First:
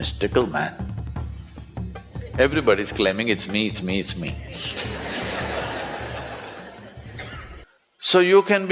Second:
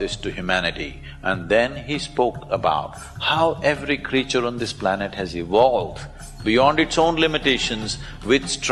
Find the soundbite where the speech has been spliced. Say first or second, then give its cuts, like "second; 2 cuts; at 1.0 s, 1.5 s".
first; 1 cut; at 7.6 s